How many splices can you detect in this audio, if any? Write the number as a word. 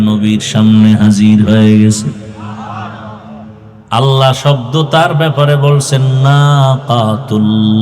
one